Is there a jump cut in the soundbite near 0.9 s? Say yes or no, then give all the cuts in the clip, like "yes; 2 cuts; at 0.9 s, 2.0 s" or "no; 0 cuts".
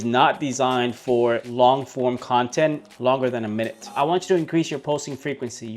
no; 1 cut; at 3.9 s